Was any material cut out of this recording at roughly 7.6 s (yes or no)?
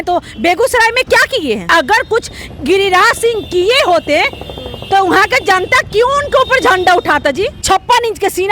yes